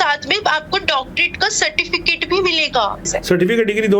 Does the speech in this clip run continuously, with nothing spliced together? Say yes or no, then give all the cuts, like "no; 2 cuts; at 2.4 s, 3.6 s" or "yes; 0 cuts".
no; 1 cut; at 3.0 s